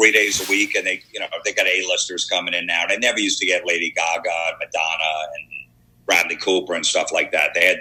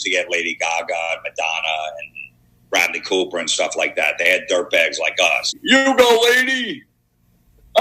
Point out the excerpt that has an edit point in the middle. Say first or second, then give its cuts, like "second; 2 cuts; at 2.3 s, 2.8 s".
second; 1 cut; at 5.6 s